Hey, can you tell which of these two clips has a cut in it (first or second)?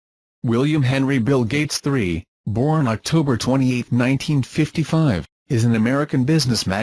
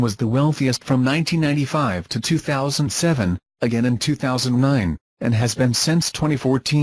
second